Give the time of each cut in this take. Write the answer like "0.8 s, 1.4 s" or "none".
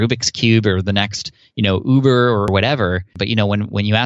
3.1 s